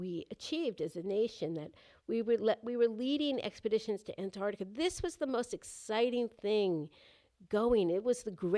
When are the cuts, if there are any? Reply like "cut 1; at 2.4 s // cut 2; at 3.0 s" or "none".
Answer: none